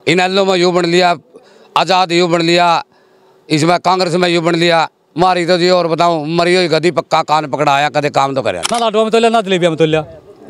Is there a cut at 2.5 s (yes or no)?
no